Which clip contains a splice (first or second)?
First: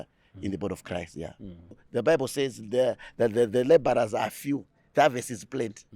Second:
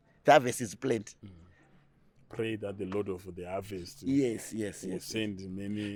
first